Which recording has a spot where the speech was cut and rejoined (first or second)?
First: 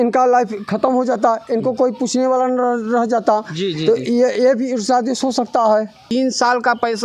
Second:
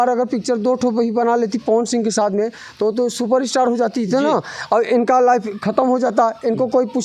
first